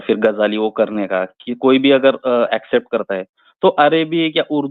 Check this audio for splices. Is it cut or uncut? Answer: uncut